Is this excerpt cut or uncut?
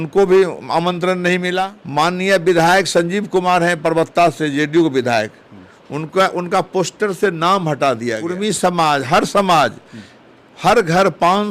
cut